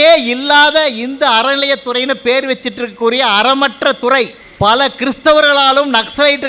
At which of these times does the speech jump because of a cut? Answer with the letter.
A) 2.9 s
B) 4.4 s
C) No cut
B